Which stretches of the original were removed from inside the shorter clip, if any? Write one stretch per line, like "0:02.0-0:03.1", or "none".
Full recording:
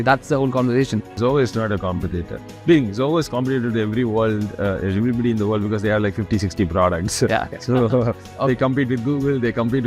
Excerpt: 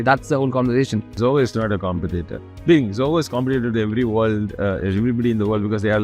none